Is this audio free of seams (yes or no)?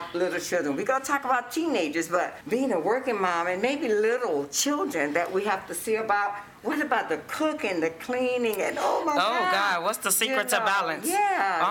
no